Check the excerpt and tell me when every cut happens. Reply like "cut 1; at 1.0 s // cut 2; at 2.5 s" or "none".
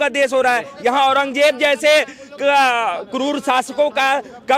none